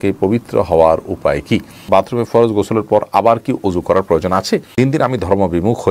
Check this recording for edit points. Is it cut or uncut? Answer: cut